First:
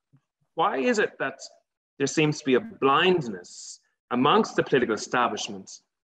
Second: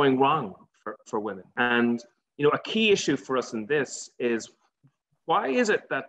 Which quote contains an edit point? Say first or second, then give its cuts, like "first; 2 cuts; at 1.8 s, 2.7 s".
second; 1 cut; at 1.5 s